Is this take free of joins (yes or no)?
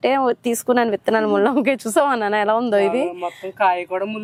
yes